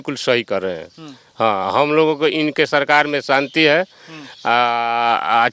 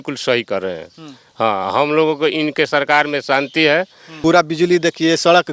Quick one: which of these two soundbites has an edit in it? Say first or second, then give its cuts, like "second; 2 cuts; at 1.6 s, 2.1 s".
second; 1 cut; at 4.0 s